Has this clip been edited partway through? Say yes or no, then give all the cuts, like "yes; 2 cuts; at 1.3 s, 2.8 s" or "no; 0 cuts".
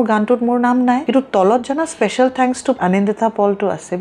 yes; 2 cuts; at 1.0 s, 2.8 s